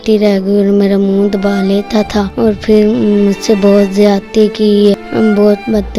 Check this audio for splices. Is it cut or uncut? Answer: cut